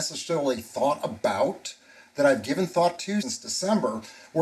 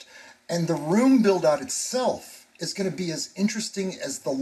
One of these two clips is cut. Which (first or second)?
first